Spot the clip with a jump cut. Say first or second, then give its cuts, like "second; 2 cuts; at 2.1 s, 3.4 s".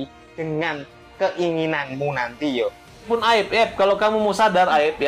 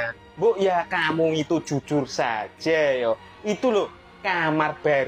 first; 1 cut; at 2.9 s